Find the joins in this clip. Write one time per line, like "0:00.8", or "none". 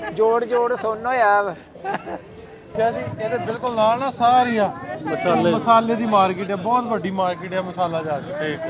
0:02.7